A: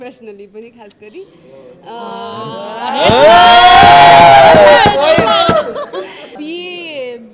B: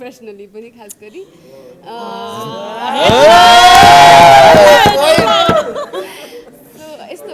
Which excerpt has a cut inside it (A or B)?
A